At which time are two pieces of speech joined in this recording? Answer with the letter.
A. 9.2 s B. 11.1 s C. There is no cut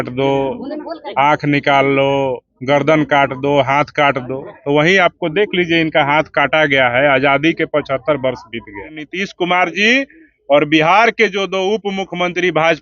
A